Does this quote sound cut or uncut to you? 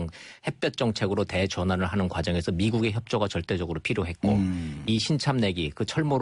uncut